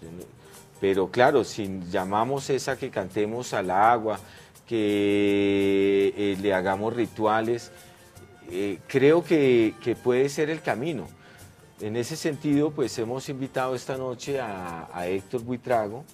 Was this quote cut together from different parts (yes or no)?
yes